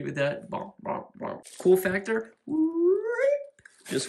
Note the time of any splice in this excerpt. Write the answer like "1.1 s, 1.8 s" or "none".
1.4 s